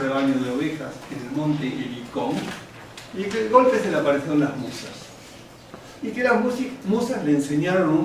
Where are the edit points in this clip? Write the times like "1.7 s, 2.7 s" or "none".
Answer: 4.6 s